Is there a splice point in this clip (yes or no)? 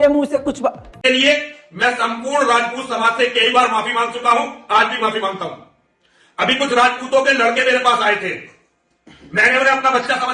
yes